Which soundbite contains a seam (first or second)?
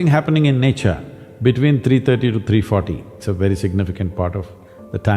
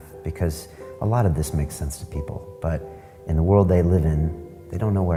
first